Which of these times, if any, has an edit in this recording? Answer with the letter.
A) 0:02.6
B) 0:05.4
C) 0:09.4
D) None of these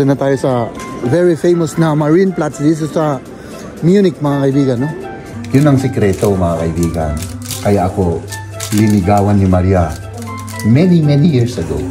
B